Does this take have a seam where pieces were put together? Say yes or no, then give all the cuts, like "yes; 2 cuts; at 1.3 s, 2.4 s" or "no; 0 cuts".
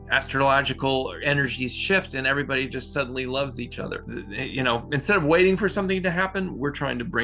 yes; 1 cut; at 4.0 s